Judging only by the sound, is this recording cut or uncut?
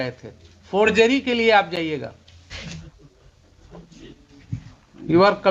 uncut